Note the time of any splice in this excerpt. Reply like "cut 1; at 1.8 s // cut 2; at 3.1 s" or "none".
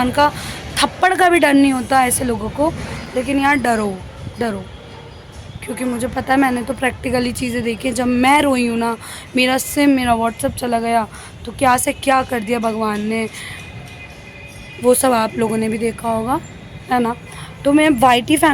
none